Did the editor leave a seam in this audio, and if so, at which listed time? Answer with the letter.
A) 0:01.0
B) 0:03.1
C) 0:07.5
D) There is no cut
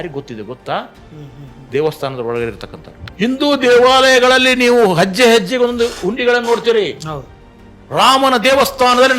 B